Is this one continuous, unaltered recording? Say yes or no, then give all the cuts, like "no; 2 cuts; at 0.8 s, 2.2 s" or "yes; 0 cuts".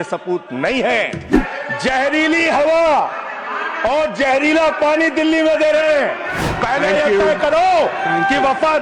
no; 2 cuts; at 1.4 s, 6.5 s